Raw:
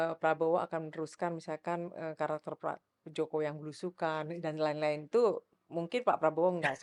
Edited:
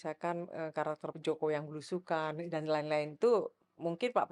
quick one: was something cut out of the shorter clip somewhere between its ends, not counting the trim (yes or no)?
yes